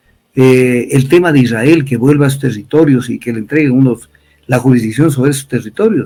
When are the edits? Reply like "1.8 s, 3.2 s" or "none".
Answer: none